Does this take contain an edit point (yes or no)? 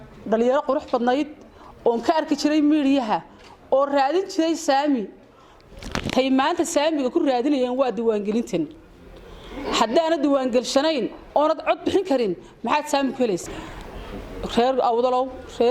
yes